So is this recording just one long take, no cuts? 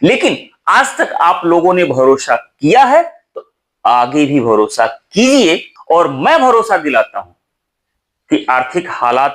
no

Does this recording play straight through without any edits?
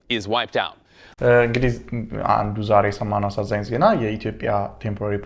no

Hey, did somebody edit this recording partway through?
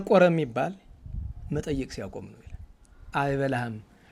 yes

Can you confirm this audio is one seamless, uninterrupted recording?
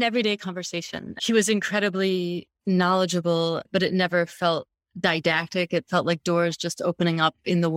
no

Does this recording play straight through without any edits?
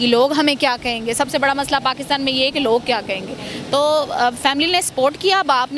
yes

